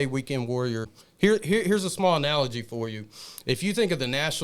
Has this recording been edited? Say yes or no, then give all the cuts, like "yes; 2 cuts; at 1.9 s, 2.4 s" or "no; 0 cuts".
yes; 1 cut; at 0.9 s